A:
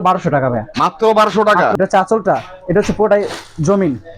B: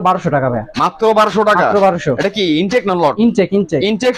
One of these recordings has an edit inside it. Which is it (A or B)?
A